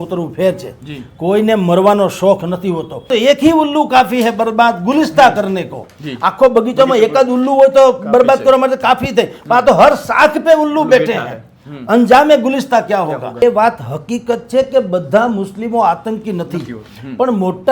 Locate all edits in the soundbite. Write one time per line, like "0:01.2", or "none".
0:03.1
0:13.4